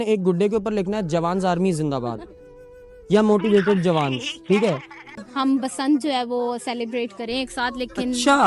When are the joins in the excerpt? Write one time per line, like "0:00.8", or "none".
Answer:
0:05.2

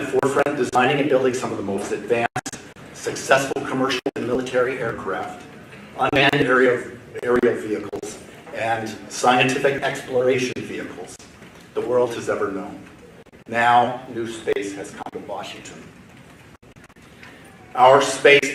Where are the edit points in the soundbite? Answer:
none

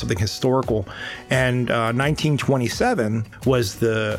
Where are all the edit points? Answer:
0:03.3

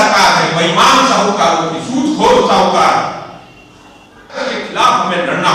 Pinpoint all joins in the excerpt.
0:04.4

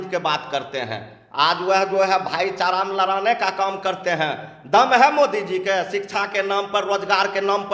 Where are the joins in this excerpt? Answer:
none

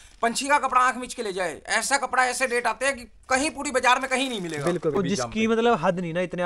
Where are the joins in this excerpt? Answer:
0:04.9

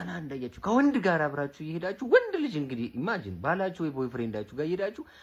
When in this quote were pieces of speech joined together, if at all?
none

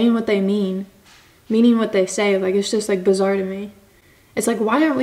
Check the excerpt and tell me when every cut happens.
none

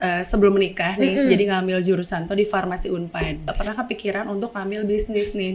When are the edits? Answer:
0:03.6

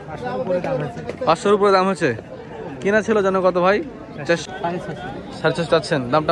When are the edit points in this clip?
0:04.5

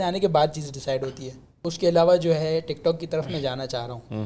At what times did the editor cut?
0:01.6

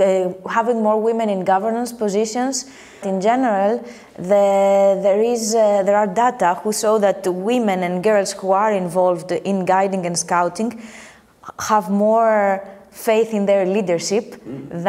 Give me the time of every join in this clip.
0:03.0

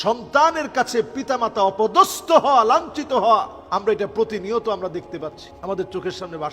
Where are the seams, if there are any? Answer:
0:03.6
0:05.5

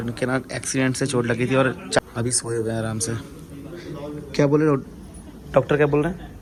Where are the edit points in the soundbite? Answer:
none

